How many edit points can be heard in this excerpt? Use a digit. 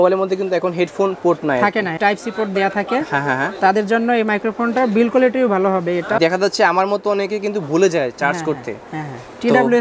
2